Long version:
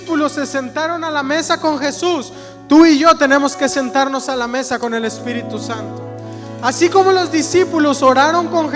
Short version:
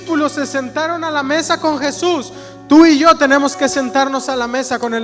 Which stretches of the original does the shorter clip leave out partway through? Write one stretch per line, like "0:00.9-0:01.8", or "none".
none